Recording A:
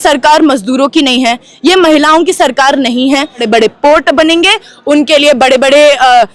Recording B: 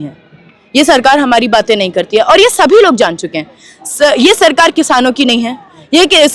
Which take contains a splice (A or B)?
A